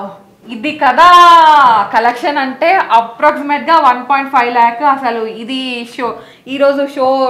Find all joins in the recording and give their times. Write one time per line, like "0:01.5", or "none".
none